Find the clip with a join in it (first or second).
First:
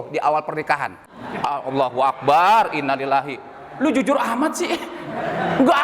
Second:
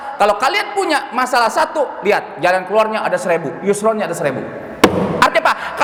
first